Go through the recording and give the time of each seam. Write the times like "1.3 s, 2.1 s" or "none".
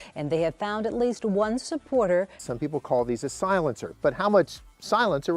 none